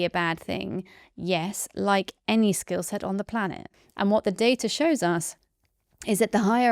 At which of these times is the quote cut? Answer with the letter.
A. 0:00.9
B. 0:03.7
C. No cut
B